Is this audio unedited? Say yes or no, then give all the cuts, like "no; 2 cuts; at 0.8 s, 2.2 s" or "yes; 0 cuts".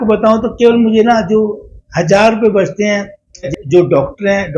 no; 1 cut; at 3.5 s